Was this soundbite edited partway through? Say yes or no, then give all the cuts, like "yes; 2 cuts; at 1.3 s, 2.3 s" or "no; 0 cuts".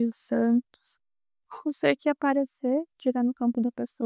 no; 0 cuts